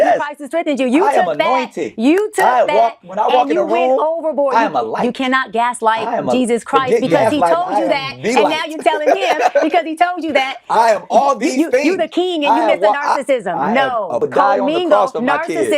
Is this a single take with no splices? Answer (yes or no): no